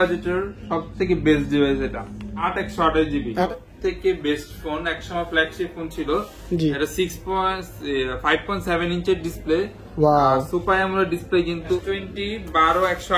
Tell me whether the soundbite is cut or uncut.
cut